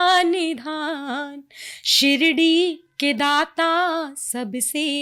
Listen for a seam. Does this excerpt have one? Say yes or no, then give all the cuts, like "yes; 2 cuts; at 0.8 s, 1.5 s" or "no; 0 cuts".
no; 0 cuts